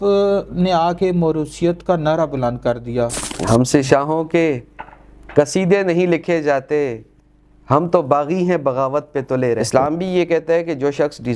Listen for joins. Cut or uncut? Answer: cut